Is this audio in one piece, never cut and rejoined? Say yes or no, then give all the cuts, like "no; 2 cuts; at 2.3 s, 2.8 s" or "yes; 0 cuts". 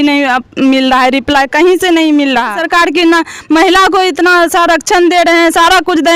no; 1 cut; at 2.6 s